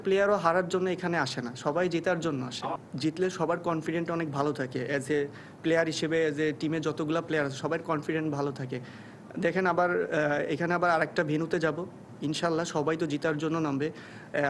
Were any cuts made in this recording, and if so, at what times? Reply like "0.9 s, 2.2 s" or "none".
2.8 s